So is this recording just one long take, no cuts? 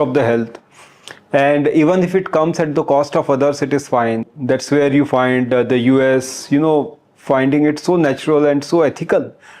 no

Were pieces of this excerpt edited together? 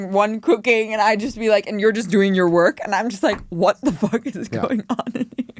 no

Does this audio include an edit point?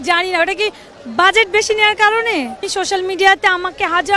yes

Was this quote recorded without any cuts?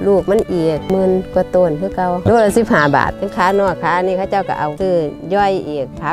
no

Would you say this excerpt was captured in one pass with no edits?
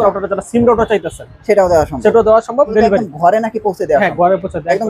no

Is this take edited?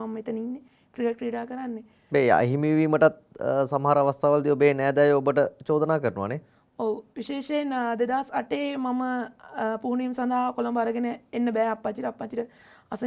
no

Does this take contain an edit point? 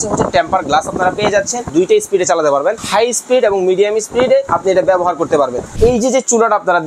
yes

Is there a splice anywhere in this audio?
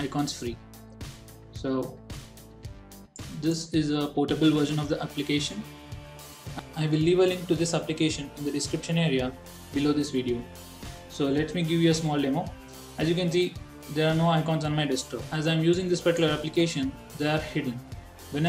yes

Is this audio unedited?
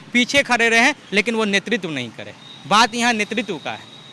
yes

